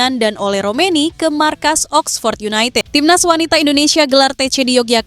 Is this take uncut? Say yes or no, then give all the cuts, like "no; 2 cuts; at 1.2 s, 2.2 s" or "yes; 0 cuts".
no; 1 cut; at 2.9 s